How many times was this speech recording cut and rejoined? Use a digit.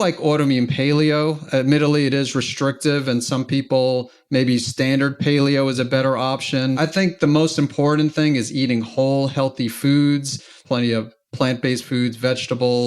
2